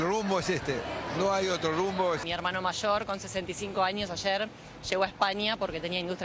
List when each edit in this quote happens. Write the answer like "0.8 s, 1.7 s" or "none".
2.2 s